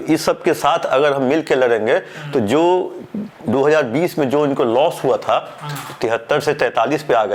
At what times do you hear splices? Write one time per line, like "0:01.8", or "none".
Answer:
none